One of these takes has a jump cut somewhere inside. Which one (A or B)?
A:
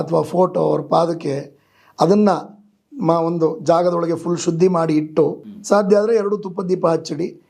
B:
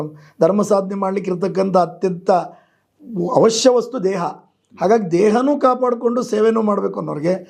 A